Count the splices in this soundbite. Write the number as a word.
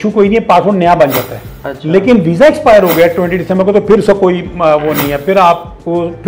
zero